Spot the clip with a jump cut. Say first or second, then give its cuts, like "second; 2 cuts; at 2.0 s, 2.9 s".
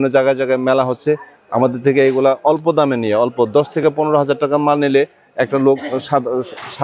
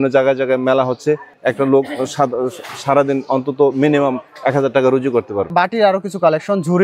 second; 2 cuts; at 1.3 s, 5.5 s